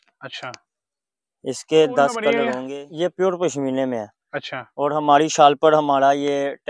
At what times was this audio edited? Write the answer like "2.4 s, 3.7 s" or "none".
2.6 s